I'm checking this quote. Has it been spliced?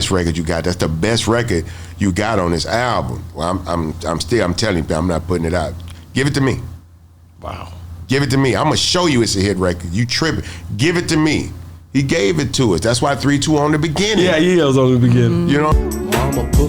no; 0 cuts

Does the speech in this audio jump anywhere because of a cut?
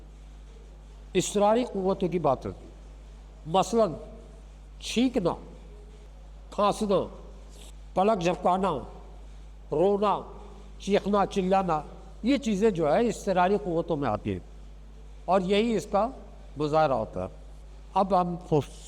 no; 0 cuts

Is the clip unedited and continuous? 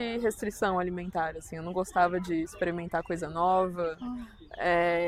yes; 0 cuts

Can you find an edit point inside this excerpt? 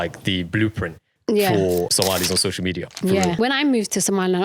yes; 2 cuts; at 1.9 s, 3.4 s

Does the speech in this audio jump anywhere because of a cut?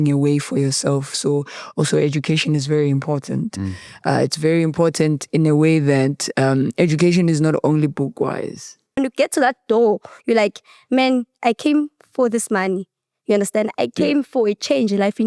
yes; 1 cut; at 9.0 s

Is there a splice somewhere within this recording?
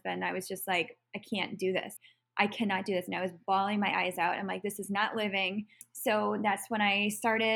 yes; 2 cuts; at 1.9 s, 5.9 s

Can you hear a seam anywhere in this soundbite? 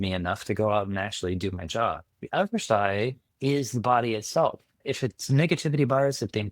yes; 3 cuts; at 2.1 s, 3.2 s, 4.8 s

